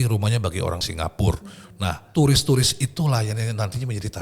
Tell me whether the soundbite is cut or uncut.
cut